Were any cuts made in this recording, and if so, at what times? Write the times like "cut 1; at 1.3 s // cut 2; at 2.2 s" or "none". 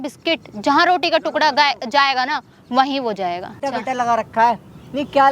cut 1; at 3.6 s